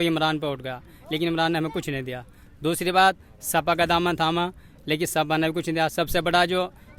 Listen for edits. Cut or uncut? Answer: uncut